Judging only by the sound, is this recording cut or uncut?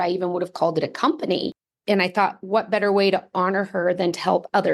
cut